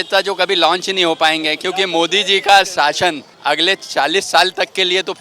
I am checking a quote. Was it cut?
yes; 1 cut; at 3.3 s

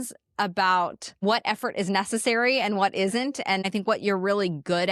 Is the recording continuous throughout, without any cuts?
no; 2 cuts; at 1.1 s, 3.6 s

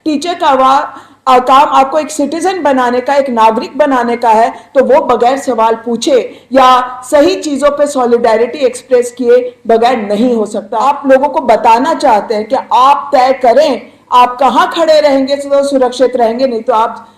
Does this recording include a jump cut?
yes; 1 cut; at 10.7 s

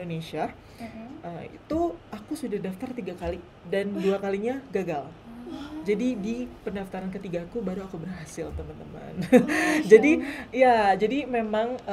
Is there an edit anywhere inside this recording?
no; 0 cuts

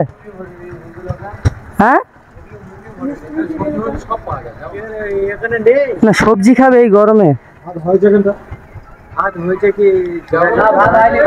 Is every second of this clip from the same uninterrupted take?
yes; 0 cuts

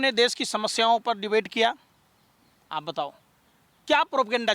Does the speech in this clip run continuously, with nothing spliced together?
yes; 0 cuts

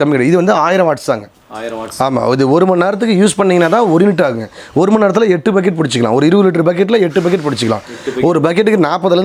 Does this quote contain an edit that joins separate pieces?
no; 0 cuts

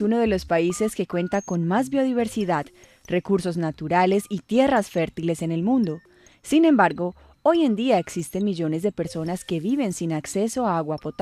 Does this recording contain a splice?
no; 0 cuts

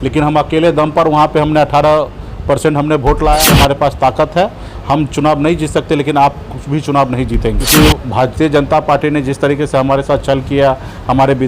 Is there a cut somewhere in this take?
yes; 2 cuts; at 3.4 s, 7.6 s

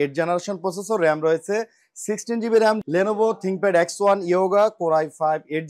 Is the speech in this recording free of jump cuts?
no; 1 cut; at 2.8 s

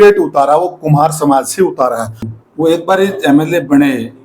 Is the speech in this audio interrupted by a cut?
yes; 1 cut; at 2.3 s

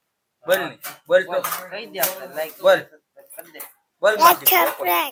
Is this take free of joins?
yes; 0 cuts

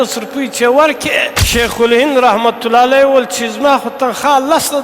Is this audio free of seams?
no; 1 cut; at 1.4 s

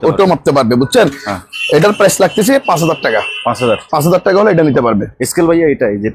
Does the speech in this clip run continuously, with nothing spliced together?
yes; 0 cuts

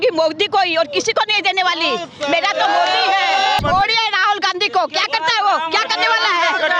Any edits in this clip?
yes; 1 cut; at 3.6 s

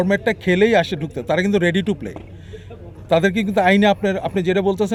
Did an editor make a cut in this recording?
no; 0 cuts

